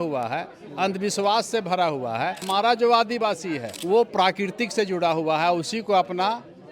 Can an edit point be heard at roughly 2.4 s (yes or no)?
yes